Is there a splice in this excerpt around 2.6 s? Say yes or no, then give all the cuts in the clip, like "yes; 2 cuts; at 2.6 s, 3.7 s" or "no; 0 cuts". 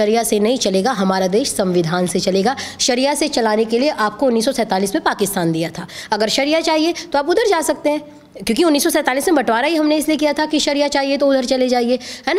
no; 0 cuts